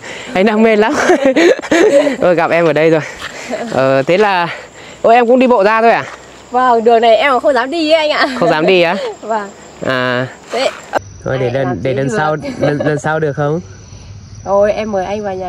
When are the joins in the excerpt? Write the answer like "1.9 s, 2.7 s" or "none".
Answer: 11.0 s